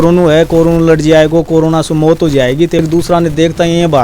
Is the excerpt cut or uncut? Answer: cut